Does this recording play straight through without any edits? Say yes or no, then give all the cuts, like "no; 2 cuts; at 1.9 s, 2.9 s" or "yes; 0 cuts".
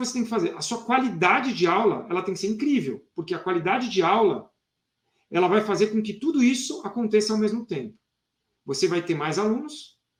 yes; 0 cuts